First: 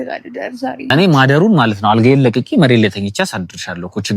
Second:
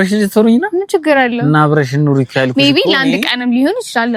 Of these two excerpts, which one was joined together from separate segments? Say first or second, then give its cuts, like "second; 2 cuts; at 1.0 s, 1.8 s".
first; 1 cut; at 0.9 s